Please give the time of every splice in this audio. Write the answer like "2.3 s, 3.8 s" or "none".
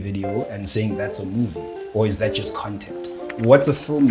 3.2 s